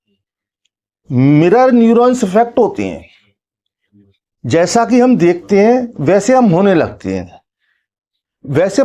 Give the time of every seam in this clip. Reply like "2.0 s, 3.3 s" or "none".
none